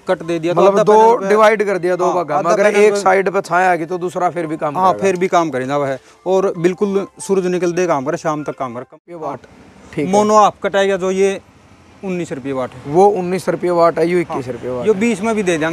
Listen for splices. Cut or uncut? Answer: cut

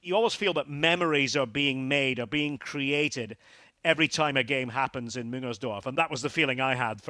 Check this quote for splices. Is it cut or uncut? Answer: cut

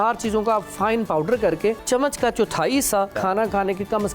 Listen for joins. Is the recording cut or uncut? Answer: cut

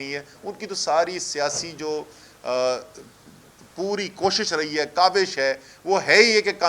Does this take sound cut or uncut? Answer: uncut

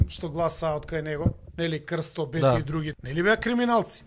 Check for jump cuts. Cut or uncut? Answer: cut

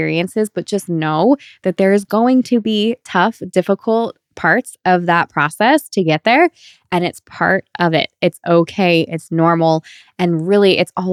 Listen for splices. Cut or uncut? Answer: uncut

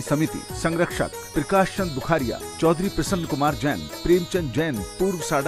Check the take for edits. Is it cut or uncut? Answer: uncut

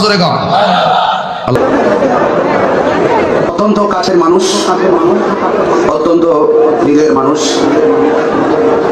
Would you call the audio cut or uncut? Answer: cut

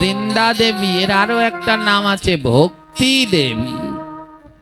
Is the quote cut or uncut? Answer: uncut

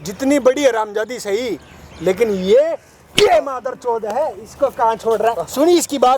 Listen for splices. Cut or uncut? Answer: uncut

